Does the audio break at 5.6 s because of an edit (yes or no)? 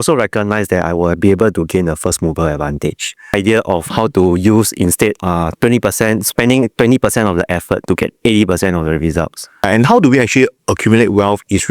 no